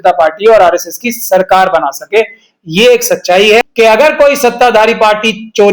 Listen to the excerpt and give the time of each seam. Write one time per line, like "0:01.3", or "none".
0:03.6